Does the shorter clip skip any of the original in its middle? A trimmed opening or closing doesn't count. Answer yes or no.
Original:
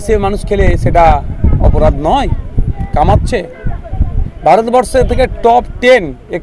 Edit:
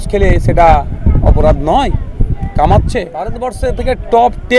yes